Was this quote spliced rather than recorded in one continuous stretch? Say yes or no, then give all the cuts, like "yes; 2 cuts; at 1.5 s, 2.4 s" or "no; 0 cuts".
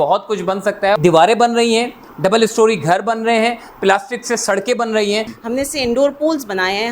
yes; 2 cuts; at 1.0 s, 5.4 s